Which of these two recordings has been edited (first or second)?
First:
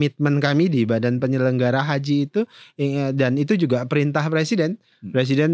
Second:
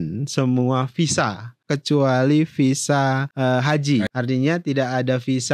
second